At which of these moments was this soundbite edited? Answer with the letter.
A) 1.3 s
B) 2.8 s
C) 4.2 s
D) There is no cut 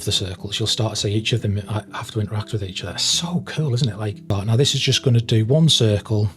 C